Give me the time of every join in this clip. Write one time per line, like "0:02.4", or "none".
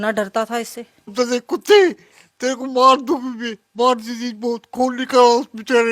0:01.1

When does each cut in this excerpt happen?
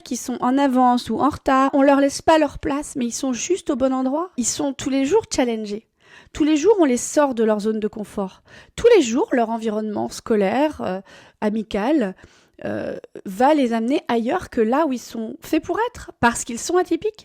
0:01.7
0:04.4

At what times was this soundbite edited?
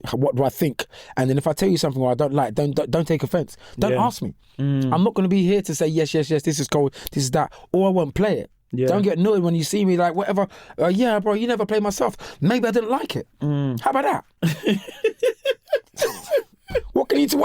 0:14.3

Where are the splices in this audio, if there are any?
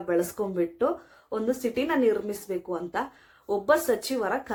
none

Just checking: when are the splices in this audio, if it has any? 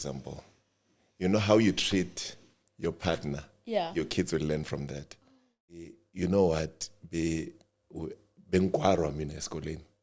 0:05.8

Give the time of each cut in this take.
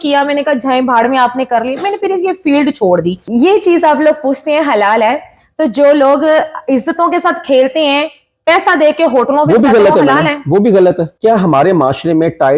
0:03.2
0:11.1

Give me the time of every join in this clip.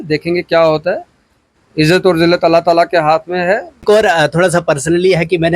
0:03.8

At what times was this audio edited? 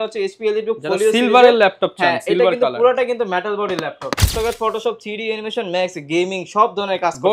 0:04.4

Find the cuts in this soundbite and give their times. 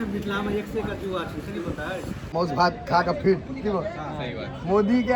0:02.2

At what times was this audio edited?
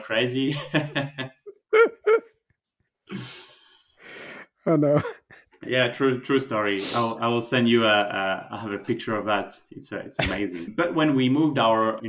0:10.7

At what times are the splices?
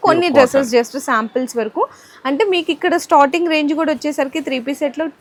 none

